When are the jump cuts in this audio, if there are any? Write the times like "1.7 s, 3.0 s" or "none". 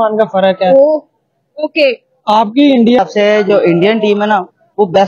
3.0 s